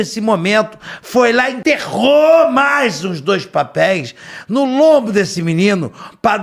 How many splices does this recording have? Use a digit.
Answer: 1